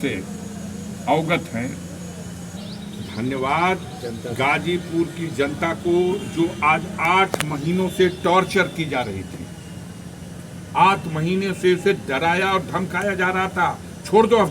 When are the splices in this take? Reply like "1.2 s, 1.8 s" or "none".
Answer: 2.6 s